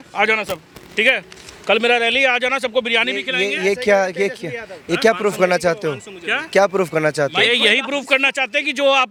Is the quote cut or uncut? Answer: uncut